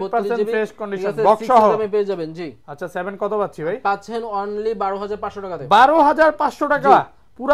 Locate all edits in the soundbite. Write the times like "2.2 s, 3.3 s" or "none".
none